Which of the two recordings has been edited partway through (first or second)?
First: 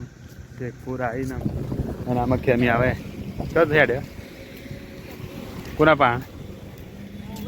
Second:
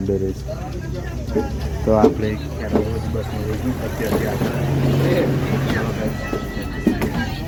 first